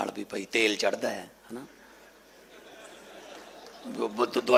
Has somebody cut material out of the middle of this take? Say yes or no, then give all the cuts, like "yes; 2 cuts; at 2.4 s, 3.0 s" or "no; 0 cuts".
no; 0 cuts